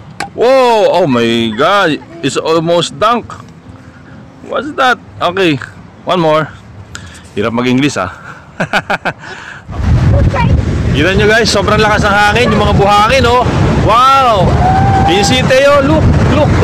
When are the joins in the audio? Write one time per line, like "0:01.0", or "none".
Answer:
0:09.7